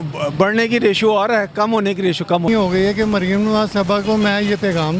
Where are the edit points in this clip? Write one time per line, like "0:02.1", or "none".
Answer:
0:02.5